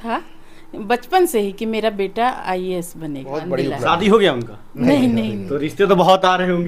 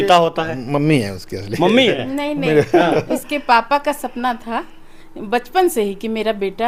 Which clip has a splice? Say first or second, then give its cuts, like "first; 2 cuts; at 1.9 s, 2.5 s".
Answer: first; 1 cut; at 3.5 s